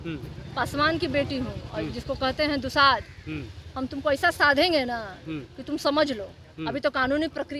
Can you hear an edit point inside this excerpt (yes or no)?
no